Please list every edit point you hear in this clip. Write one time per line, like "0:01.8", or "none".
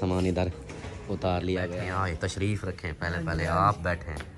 0:01.8